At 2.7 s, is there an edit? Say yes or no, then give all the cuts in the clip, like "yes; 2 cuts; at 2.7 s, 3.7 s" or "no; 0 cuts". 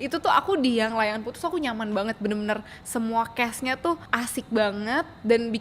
no; 1 cut; at 4.1 s